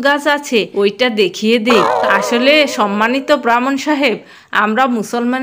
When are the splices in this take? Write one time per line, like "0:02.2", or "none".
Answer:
0:01.9